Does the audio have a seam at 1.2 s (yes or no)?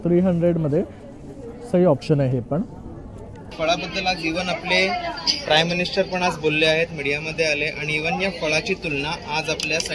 no